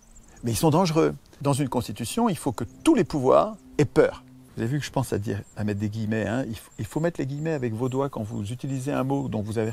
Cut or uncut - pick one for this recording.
cut